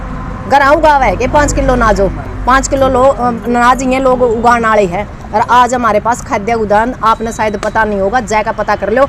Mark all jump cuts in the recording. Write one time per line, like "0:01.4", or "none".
none